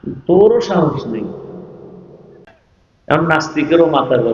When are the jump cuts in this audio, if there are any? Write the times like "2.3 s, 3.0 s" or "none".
2.4 s